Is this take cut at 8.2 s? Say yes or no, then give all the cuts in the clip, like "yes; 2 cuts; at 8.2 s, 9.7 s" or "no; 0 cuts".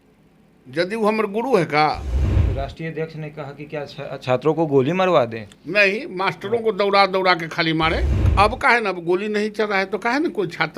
yes; 2 cuts; at 2.4 s, 8.2 s